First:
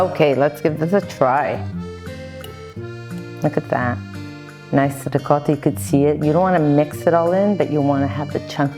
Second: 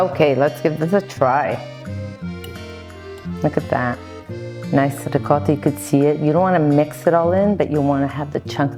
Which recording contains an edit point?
first; 2 cuts; at 1.6 s, 3.4 s

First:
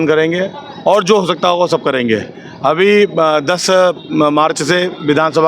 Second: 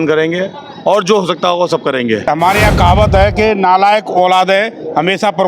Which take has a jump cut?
second; 1 cut; at 2.3 s

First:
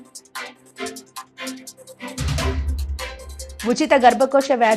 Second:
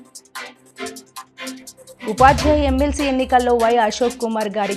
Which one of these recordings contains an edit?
first; 2 cuts; at 1.6 s, 2.8 s

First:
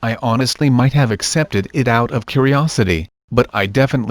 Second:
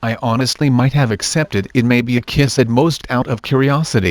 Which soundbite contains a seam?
first; 1 cut; at 1.8 s

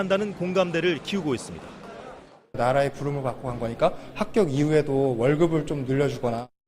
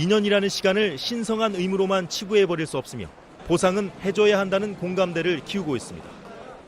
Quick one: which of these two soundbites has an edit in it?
second; 1 cut; at 2.2 s

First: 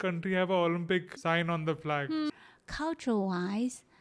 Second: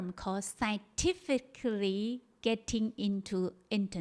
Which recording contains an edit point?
first; 2 cuts; at 1.1 s, 2.3 s

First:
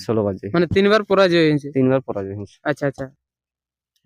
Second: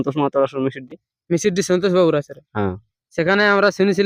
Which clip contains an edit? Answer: first; 1 cut; at 3.1 s

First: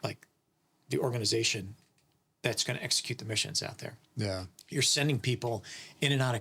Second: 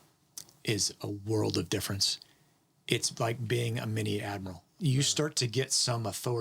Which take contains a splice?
second; 1 cut; at 4.7 s

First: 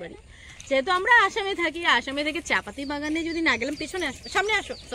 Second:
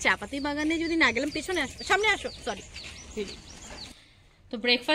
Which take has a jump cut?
second; 1 cut; at 3.8 s

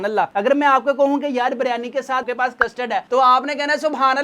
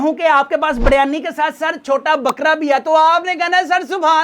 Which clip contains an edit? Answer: first; 1 cut; at 2.3 s

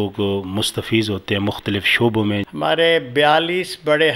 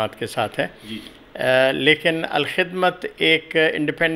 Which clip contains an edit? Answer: first; 1 cut; at 2.5 s

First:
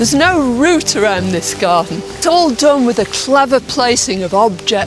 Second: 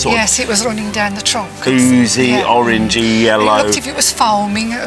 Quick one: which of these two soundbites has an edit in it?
first; 1 cut; at 2.2 s

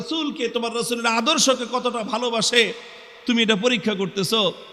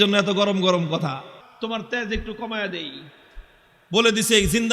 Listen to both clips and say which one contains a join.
second; 1 cut; at 1.4 s

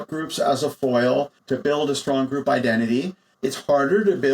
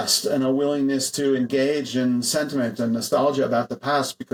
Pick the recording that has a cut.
first; 2 cuts; at 1.4 s, 3.2 s

